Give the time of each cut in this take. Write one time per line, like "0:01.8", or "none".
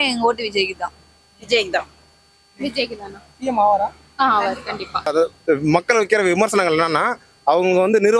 0:05.1

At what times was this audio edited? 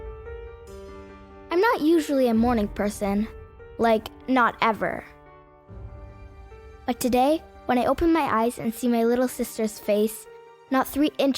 0:01.0

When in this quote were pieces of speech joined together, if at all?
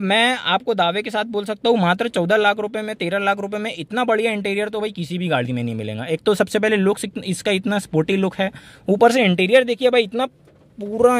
none

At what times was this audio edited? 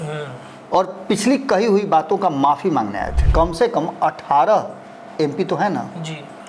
0:03.2

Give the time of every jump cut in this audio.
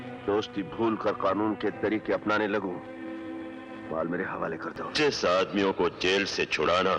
0:04.9

